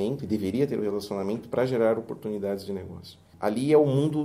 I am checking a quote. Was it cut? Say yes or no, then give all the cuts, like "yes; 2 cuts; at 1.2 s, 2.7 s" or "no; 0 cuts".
yes; 1 cut; at 3.2 s